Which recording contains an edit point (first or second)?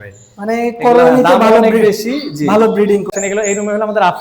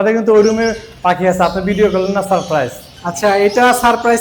first